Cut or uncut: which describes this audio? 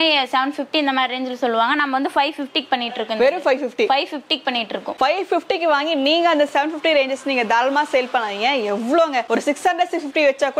uncut